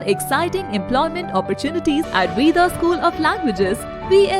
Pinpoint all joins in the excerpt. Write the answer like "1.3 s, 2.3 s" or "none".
2.1 s

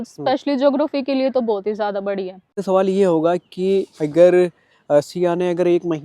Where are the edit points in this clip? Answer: 2.6 s

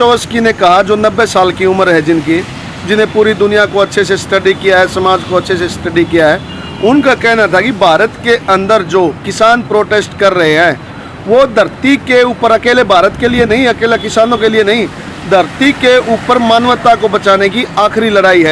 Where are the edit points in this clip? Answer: none

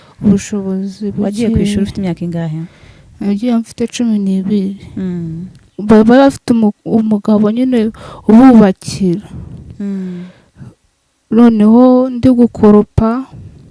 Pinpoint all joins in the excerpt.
5.7 s

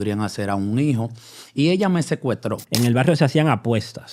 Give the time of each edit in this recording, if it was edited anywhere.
2.6 s

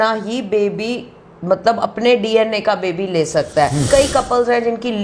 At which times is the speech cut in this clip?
3.9 s

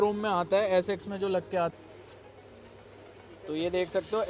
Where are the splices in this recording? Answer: 1.7 s

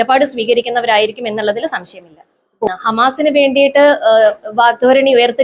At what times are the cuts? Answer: 2.7 s

